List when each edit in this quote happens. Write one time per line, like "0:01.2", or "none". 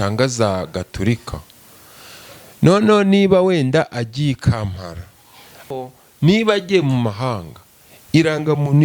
0:05.7